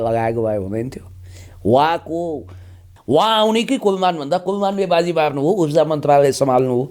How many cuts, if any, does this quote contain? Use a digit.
1